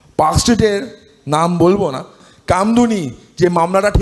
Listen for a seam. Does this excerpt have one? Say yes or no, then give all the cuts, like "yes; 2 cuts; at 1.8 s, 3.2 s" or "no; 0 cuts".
yes; 1 cut; at 2.2 s